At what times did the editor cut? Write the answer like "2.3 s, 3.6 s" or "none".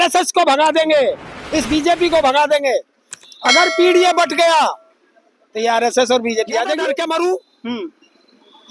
6.8 s

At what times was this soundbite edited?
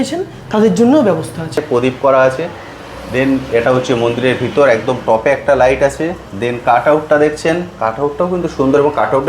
1.6 s

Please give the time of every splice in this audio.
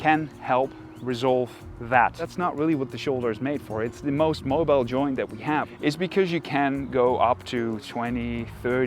2.3 s, 5.7 s

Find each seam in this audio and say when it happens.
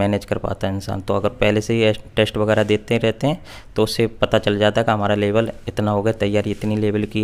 none

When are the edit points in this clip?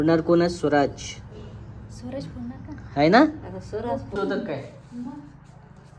4.1 s

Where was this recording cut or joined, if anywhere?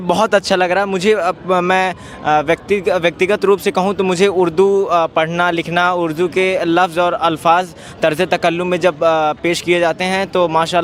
none

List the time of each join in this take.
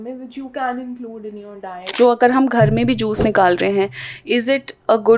1.8 s

